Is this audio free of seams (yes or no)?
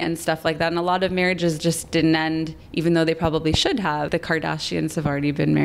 no